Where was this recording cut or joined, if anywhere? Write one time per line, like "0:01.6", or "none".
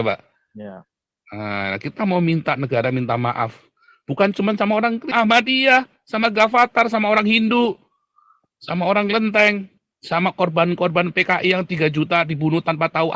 none